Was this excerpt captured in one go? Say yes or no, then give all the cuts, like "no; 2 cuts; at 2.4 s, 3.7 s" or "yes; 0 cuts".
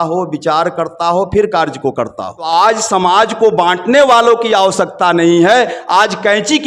no; 1 cut; at 2.4 s